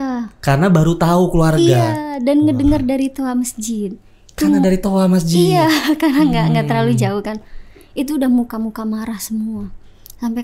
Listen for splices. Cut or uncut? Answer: uncut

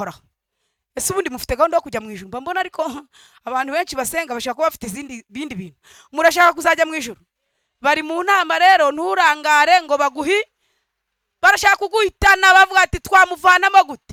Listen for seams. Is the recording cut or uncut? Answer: uncut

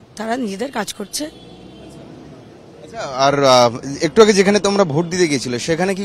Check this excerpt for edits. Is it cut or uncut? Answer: uncut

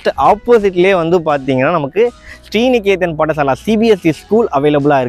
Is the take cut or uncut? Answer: uncut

